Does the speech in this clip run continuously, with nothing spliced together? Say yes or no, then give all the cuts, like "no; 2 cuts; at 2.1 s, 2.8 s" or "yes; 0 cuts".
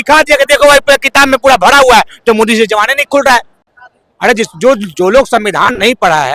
yes; 0 cuts